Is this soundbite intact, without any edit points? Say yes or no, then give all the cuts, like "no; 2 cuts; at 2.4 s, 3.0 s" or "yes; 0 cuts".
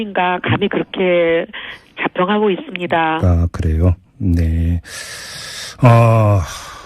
no; 1 cut; at 4.5 s